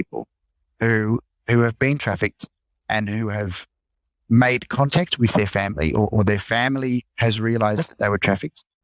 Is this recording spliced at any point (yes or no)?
no